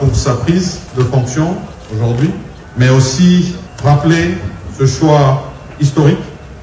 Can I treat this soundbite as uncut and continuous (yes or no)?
no